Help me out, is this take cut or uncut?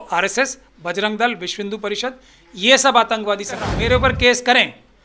cut